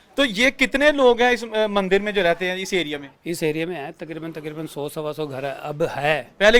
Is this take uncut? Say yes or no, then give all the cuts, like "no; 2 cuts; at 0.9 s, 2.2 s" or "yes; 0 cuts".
yes; 0 cuts